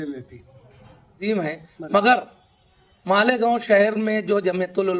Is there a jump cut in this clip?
yes; 1 cut; at 1.2 s

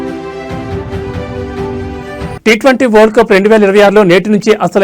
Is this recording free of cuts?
yes; 0 cuts

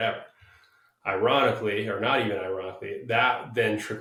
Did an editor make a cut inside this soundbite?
no; 0 cuts

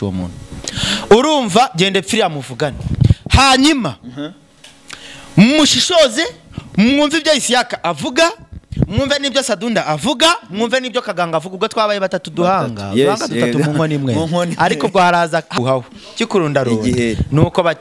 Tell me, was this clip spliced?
yes; 1 cut; at 15.5 s

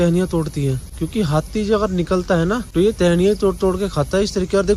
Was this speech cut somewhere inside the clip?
yes; 2 cuts; at 0.9 s, 2.7 s

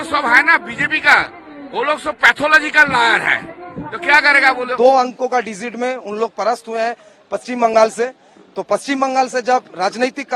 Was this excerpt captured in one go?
no; 1 cut; at 4.7 s

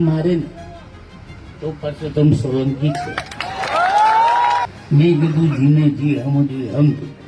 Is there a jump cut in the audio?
yes; 1 cut; at 4.8 s

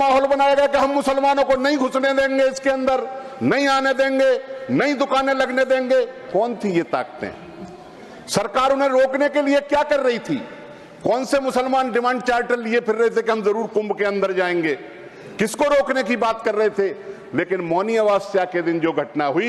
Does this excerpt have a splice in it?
no; 0 cuts

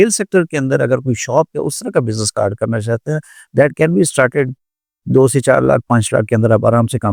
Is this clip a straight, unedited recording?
yes; 0 cuts

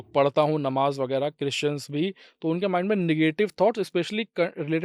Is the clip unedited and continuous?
yes; 0 cuts

